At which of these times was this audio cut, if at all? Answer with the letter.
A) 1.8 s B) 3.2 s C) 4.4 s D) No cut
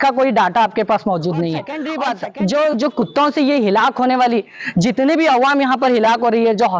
A